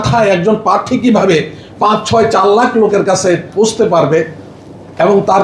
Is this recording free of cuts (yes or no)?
yes